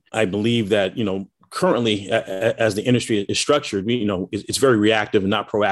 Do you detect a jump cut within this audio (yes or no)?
yes